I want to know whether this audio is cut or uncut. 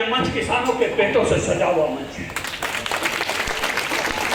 uncut